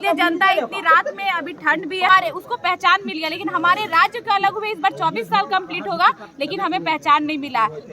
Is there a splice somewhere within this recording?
yes; 1 cut; at 2.1 s

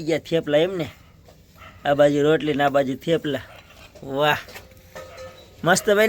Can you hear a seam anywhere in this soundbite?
no; 0 cuts

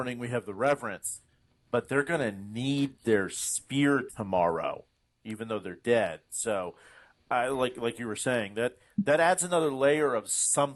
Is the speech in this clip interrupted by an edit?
no; 0 cuts

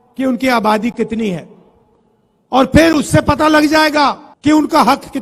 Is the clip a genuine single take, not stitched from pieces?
no; 1 cut; at 4.3 s

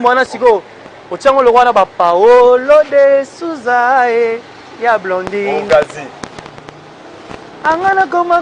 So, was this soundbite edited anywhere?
no; 0 cuts

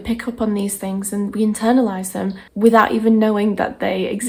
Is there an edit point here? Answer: no; 0 cuts

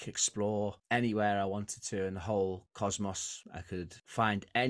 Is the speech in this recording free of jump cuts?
yes; 0 cuts

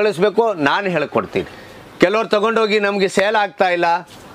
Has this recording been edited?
yes; 1 cut; at 1.6 s

